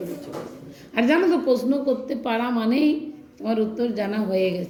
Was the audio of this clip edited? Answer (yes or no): no